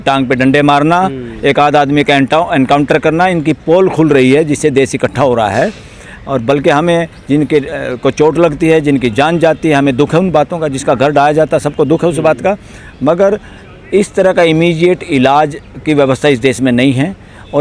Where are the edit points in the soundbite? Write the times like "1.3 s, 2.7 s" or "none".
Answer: none